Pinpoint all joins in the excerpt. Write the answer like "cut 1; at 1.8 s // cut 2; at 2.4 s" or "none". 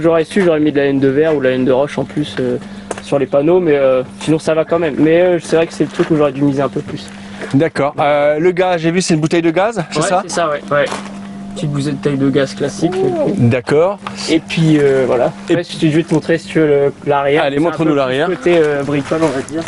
none